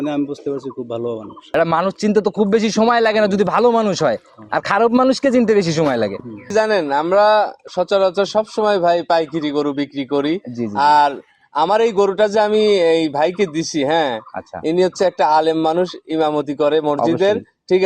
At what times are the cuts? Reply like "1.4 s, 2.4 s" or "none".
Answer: 1.4 s, 6.4 s